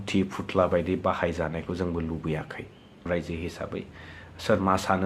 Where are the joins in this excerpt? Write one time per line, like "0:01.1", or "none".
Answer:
0:03.1